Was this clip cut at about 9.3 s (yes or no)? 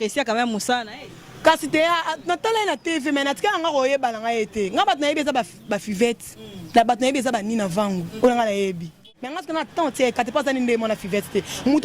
yes